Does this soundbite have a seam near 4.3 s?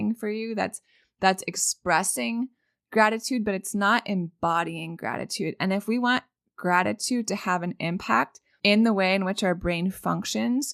no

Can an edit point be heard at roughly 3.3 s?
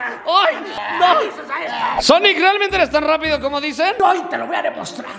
no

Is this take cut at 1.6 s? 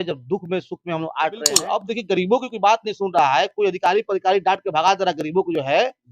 yes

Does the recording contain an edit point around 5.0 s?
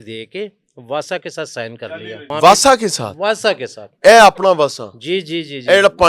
no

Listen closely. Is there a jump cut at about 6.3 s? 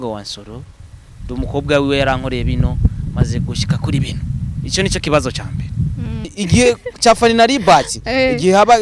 yes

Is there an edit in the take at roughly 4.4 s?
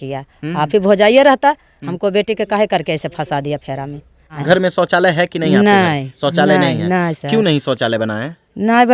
yes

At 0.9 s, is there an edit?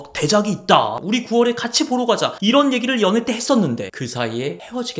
yes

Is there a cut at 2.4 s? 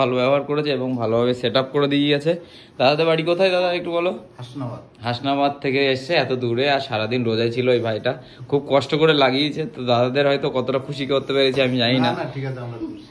no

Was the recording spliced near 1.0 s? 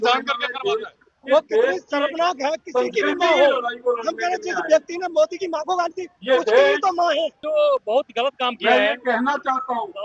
yes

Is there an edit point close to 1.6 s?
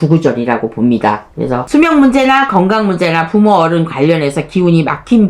yes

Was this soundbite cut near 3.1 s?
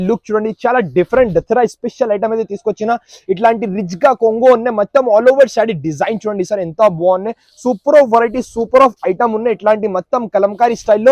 no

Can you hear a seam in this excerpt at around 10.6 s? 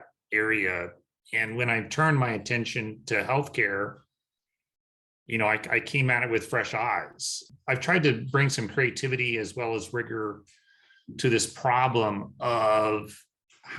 no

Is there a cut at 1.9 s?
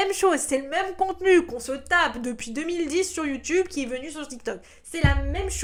no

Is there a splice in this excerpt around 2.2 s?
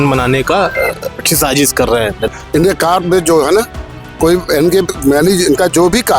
yes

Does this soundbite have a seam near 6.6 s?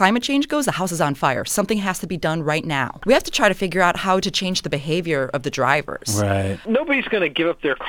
yes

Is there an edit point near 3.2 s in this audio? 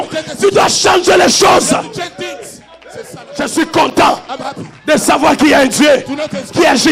yes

